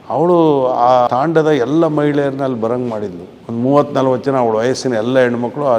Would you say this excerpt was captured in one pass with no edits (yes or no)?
no